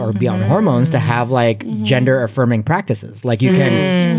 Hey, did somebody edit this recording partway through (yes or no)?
no